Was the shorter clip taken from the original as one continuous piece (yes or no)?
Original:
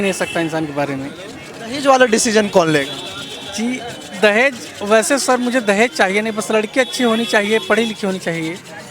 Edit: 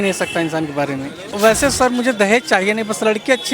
no